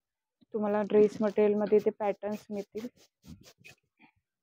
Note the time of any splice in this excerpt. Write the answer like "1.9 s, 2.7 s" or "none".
none